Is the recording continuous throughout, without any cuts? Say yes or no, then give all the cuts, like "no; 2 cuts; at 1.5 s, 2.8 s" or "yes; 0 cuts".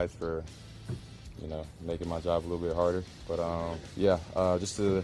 no; 1 cut; at 3.8 s